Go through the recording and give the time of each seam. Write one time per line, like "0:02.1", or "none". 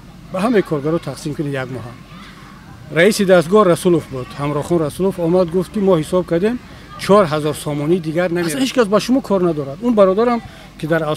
0:08.4